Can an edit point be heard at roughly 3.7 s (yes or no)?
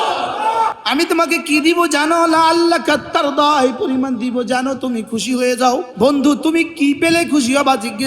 no